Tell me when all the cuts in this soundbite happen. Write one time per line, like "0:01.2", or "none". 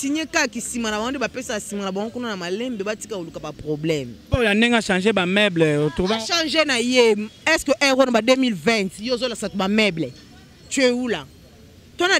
0:04.2